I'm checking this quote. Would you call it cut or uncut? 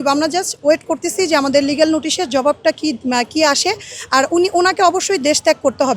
uncut